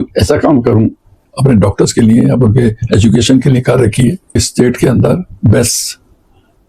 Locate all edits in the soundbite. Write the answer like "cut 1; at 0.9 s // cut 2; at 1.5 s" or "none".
cut 1; at 1.2 s // cut 2; at 4.5 s